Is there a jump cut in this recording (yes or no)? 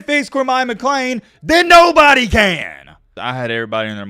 yes